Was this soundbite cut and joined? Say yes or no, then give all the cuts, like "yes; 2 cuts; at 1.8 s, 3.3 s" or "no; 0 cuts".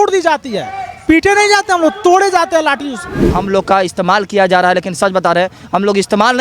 yes; 1 cut; at 3.3 s